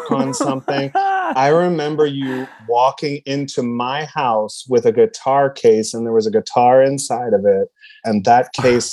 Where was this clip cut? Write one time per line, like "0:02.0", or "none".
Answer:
0:08.0